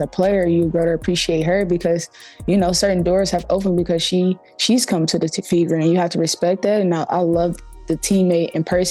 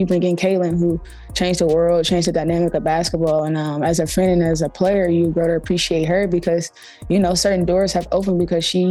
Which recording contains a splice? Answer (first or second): first